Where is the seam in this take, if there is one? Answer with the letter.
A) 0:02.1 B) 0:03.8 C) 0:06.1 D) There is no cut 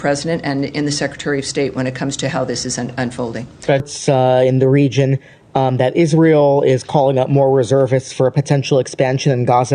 B